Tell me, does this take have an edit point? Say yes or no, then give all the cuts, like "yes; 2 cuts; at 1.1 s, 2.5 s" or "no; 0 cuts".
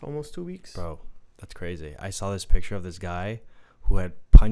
no; 0 cuts